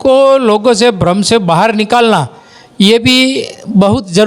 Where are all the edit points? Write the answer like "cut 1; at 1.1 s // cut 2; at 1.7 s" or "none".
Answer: none